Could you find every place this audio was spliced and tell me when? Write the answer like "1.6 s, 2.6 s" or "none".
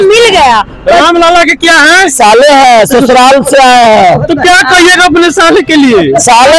none